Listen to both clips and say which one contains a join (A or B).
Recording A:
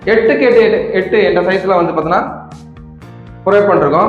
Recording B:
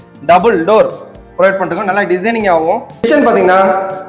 B